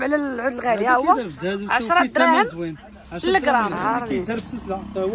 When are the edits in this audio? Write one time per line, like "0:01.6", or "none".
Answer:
0:03.8